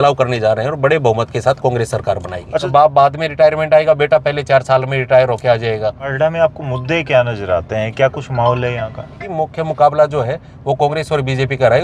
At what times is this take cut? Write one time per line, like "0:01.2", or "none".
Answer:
0:02.7
0:06.1
0:09.2